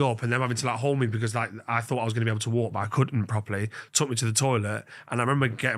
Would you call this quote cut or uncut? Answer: uncut